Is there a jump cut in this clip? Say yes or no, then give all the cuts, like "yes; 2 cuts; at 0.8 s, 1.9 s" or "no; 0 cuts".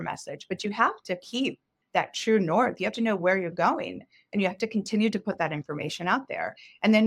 yes; 1 cut; at 1.7 s